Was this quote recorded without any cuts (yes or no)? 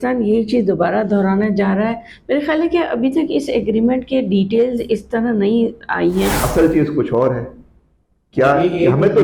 no